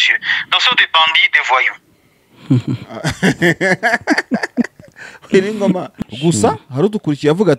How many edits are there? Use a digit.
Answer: 1